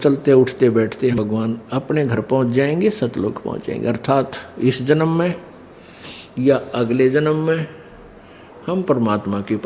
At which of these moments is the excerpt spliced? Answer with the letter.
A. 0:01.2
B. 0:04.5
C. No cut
A